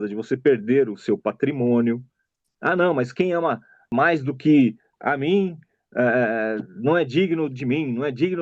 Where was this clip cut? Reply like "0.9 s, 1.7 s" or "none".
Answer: 2.5 s, 3.7 s, 4.9 s